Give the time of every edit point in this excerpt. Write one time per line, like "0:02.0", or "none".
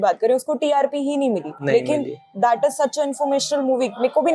none